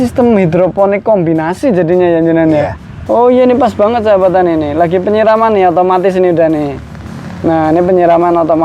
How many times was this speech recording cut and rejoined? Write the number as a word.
one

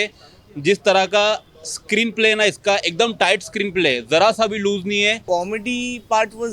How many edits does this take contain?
one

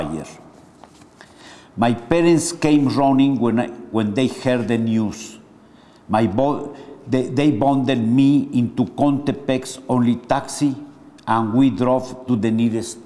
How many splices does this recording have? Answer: zero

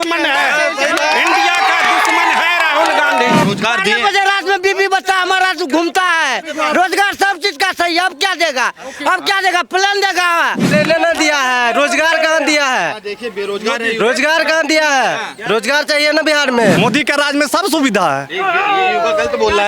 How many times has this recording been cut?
three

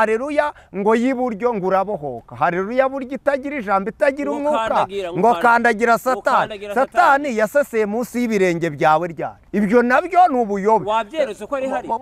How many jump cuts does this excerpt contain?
one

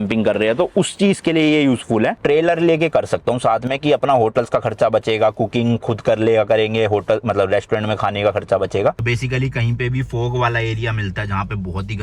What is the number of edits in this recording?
two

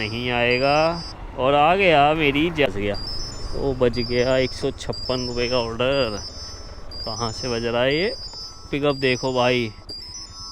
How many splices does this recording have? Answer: one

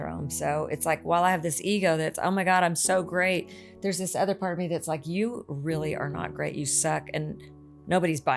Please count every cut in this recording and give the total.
zero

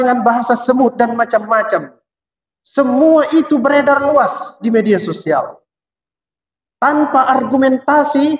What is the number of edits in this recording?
zero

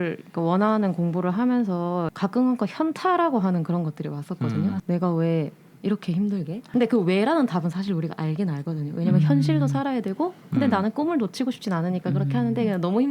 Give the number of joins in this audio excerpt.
three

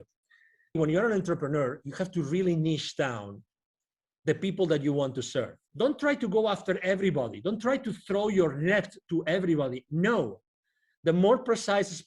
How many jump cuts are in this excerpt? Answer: two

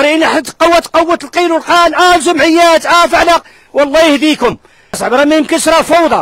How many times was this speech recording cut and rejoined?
one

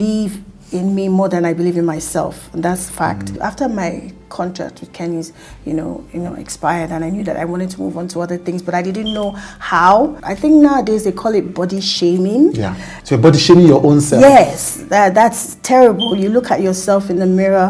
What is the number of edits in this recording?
two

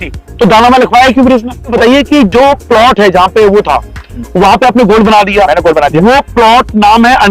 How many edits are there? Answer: one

